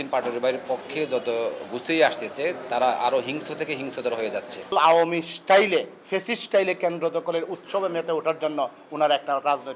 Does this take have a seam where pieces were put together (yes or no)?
yes